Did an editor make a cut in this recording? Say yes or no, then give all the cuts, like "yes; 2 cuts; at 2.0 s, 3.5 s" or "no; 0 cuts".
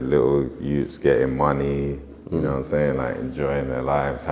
no; 0 cuts